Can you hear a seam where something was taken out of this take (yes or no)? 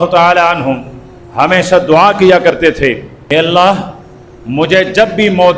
yes